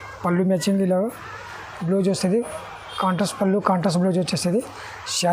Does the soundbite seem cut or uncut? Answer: uncut